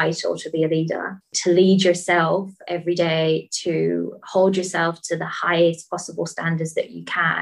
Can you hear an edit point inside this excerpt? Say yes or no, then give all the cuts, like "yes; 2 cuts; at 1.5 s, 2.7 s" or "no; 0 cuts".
yes; 1 cut; at 1.3 s